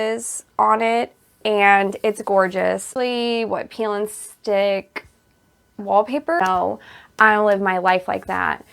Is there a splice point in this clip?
yes; 2 cuts; at 2.9 s, 6.4 s

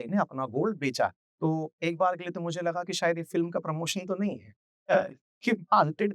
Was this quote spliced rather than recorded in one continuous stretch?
yes; 1 cut; at 1.2 s

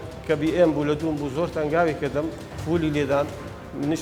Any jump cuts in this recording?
no; 0 cuts

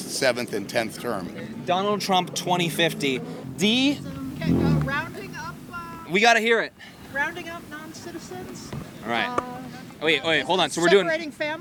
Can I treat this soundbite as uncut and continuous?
yes; 0 cuts

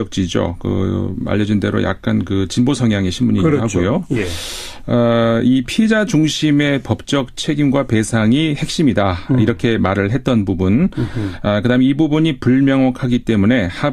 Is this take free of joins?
no; 1 cut; at 9.3 s

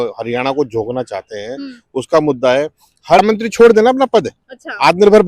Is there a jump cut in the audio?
yes; 1 cut; at 3.2 s

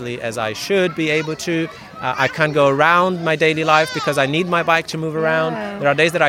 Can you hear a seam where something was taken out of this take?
no; 0 cuts

